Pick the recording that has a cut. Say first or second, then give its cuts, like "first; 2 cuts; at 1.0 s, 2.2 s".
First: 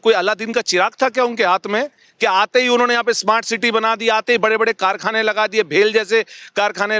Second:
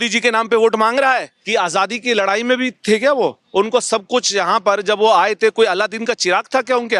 second; 1 cut; at 1.3 s